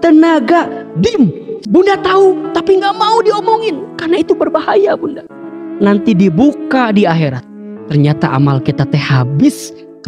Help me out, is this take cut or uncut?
uncut